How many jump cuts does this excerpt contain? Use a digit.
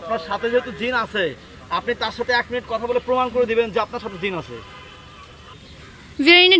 1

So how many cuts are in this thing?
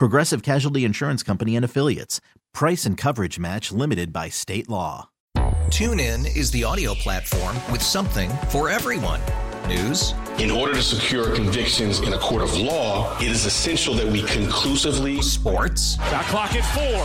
1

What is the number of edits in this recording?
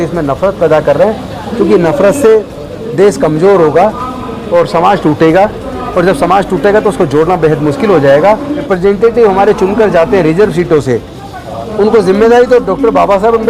1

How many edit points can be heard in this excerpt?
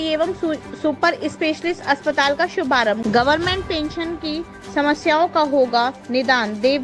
1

